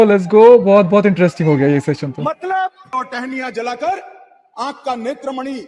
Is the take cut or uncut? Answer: cut